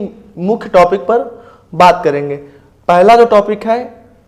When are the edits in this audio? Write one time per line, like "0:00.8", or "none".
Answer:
none